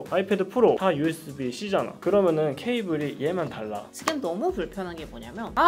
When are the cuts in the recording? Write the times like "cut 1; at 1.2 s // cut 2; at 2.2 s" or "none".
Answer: cut 1; at 3.9 s